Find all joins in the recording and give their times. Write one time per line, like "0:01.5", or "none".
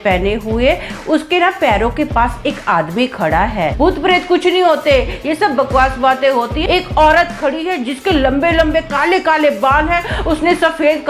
0:03.7
0:06.6